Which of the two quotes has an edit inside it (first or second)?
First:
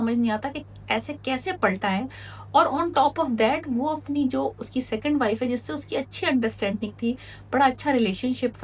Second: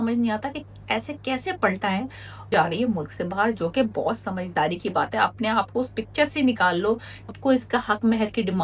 second